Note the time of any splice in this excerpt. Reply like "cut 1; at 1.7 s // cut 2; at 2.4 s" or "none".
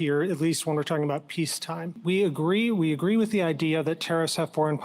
cut 1; at 1.9 s

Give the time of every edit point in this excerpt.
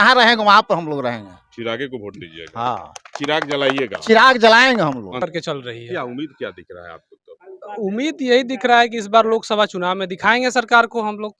none

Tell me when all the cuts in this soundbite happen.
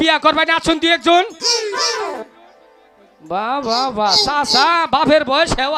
none

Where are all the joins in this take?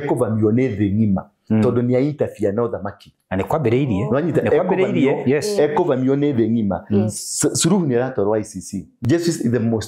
cut 1; at 8.9 s

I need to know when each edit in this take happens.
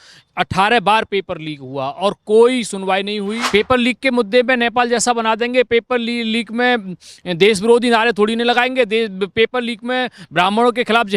cut 1; at 3.4 s

